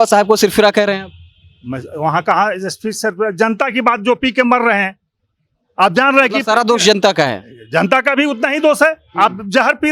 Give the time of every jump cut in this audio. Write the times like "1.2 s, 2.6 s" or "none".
none